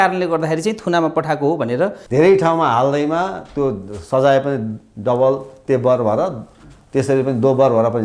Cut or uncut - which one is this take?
cut